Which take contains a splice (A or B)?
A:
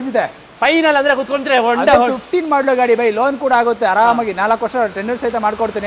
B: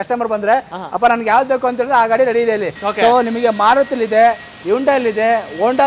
B